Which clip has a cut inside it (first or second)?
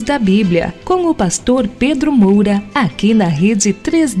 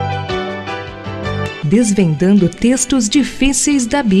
first